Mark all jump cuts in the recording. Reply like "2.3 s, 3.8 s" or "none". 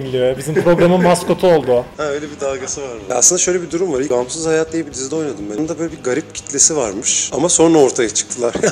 2.9 s, 4.1 s, 5.5 s